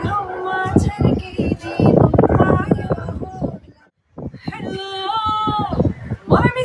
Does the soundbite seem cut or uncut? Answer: cut